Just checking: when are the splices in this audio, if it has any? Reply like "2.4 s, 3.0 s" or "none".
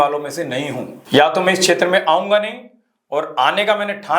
0.9 s